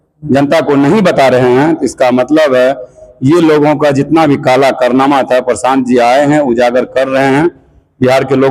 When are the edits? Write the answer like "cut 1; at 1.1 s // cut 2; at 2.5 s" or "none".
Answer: none

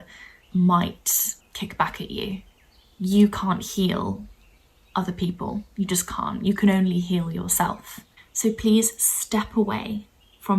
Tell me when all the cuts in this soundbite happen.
cut 1; at 8.2 s

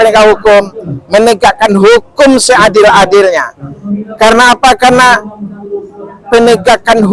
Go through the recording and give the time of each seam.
none

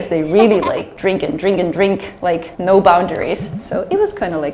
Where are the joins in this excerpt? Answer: none

